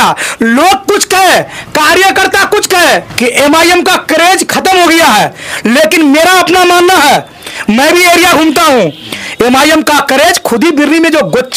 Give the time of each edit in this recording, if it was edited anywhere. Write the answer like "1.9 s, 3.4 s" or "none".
none